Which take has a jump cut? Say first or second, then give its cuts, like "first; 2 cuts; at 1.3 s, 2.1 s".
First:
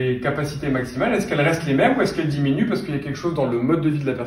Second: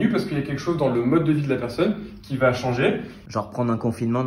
second; 1 cut; at 3.2 s